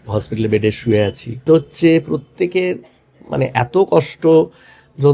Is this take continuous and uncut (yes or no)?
no